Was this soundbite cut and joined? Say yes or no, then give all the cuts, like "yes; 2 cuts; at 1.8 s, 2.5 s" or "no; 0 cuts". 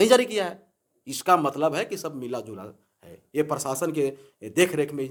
no; 0 cuts